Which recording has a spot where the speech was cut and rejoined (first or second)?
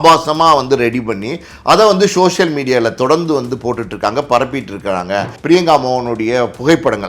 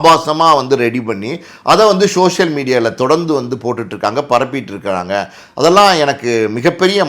first